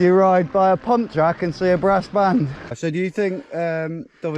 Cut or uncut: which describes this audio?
cut